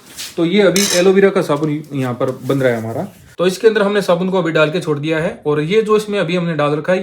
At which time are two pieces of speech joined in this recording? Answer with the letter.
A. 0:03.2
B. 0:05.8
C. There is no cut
A